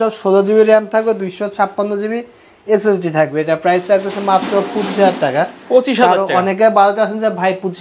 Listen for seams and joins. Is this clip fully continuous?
yes; 0 cuts

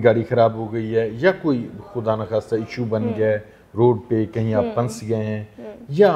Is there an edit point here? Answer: no; 0 cuts

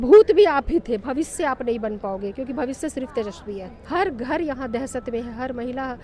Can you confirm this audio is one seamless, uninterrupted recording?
no; 1 cut; at 3.7 s

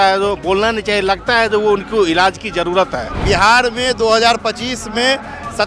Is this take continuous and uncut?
no; 1 cut; at 3.1 s

